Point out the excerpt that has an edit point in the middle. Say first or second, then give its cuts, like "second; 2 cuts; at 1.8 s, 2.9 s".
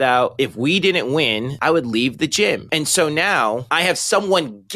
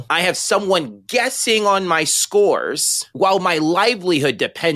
first; 2 cuts; at 1.5 s, 2.7 s